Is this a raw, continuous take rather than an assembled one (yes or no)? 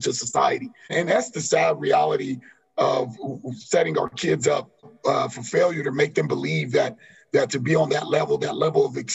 no